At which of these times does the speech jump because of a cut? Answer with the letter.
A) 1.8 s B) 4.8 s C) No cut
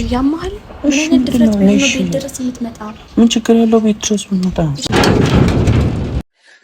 B